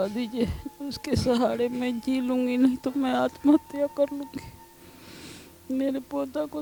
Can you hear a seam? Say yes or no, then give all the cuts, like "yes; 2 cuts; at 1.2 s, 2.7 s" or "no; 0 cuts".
no; 0 cuts